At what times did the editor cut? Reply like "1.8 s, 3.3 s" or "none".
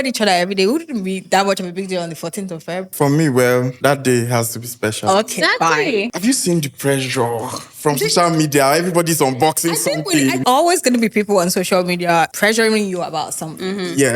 2.9 s, 3.7 s, 6.1 s, 10.4 s, 12.3 s